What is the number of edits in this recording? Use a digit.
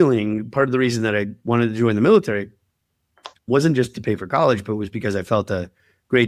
0